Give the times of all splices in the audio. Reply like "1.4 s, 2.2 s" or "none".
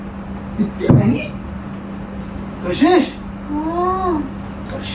none